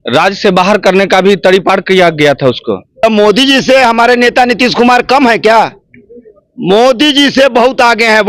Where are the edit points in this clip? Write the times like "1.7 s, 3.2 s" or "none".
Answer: 3.0 s